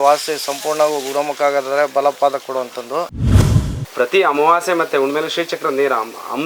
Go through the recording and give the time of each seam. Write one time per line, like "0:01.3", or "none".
0:03.5